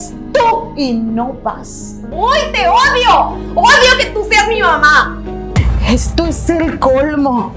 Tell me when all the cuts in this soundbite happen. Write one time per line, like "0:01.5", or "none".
0:02.0
0:05.5